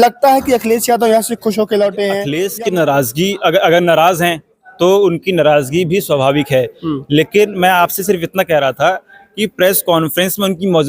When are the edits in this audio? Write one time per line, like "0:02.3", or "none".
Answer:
0:02.2